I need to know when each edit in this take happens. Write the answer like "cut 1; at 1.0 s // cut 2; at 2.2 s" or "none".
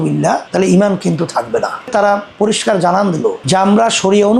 cut 1; at 1.9 s